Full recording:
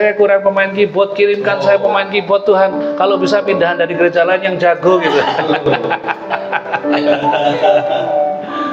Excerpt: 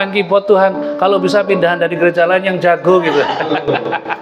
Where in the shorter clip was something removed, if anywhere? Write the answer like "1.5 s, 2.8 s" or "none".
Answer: none

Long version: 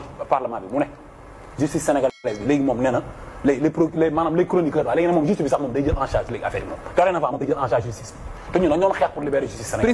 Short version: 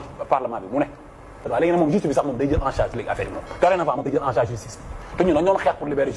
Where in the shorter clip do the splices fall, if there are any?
1.5 s

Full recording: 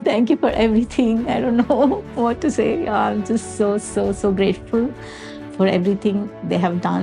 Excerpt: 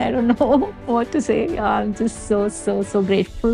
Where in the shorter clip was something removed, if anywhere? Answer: none

